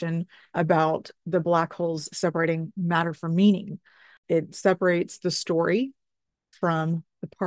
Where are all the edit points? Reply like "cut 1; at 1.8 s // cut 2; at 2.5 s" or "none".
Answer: cut 1; at 4.1 s